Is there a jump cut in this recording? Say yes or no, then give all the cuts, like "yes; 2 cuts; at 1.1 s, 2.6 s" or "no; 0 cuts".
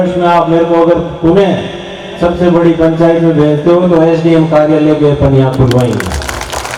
no; 0 cuts